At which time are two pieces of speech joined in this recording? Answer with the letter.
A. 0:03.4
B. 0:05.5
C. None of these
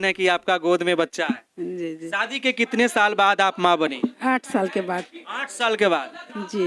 C